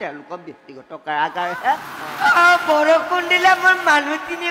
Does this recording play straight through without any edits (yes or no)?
no